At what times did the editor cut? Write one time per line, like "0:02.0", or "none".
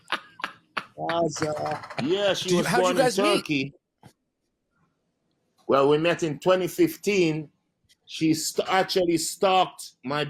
0:01.9

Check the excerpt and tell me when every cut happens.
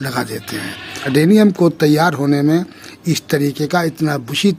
0:01.1

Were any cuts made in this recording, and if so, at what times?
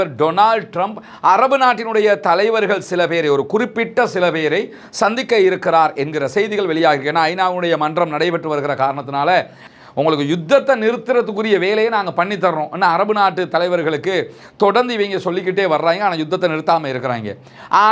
0:09.6

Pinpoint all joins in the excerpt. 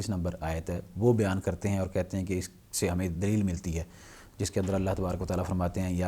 none

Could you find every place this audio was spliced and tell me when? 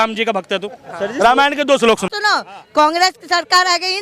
0:02.1

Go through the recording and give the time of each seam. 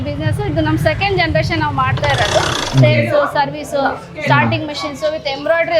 0:02.5

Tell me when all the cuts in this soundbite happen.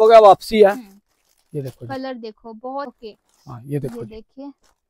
0:02.9

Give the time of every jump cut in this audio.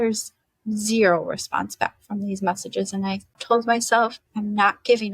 0:03.3
0:04.2

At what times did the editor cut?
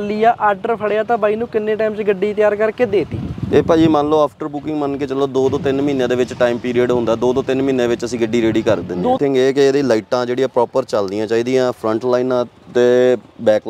0:09.2

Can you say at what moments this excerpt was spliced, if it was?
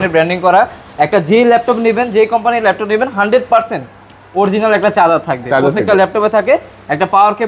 none

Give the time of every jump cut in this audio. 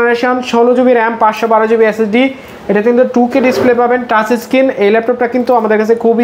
none

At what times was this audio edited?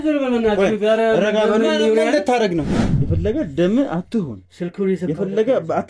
0:02.8

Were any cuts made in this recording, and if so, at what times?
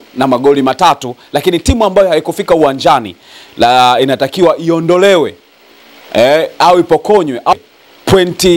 0:07.5

